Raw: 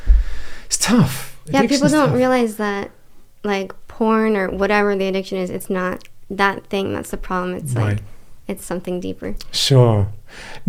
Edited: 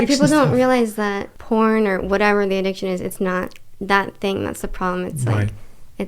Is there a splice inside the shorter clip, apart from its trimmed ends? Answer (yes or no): yes